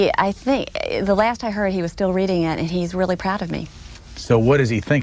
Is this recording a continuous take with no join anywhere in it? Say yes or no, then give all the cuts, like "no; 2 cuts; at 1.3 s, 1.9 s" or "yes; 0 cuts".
no; 1 cut; at 1.6 s